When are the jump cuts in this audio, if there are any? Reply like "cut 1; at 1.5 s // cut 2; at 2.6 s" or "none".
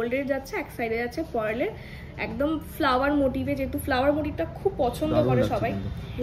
none